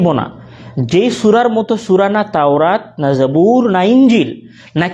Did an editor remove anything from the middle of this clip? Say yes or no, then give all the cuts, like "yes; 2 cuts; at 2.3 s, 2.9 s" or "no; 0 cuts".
no; 0 cuts